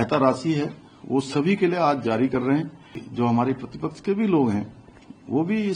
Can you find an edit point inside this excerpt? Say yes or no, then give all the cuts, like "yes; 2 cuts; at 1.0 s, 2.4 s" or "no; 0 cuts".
yes; 1 cut; at 3.1 s